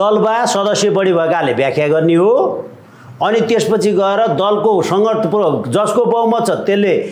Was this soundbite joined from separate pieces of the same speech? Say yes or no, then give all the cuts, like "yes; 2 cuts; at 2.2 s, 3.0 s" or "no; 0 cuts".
no; 0 cuts